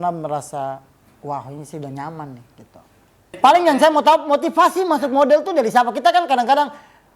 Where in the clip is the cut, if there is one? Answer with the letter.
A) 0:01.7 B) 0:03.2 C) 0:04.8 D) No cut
B